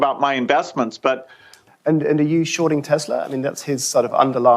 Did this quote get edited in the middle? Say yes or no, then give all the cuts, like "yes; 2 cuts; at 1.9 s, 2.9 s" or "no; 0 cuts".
yes; 1 cut; at 1.6 s